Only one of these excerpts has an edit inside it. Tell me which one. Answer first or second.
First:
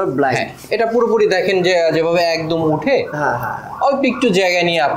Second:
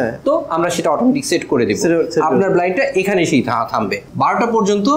second